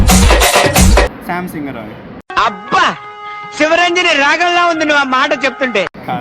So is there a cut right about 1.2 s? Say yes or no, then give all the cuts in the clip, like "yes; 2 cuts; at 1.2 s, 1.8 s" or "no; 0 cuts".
yes; 1 cut; at 1.2 s